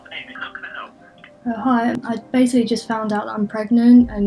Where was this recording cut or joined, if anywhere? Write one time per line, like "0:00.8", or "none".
none